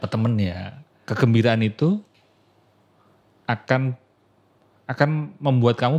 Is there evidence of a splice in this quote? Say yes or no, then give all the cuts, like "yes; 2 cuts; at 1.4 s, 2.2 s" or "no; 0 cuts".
yes; 1 cut; at 1.0 s